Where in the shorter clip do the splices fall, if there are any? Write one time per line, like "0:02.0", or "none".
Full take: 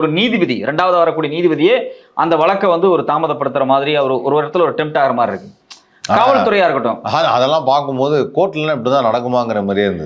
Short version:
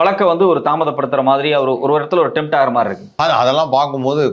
0:03.1